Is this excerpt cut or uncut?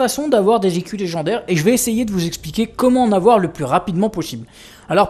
uncut